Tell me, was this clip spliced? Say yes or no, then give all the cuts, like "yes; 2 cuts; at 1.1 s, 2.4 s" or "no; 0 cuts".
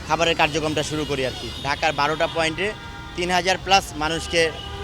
yes; 1 cut; at 1.5 s